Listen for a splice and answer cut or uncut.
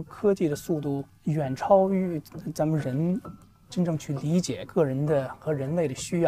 cut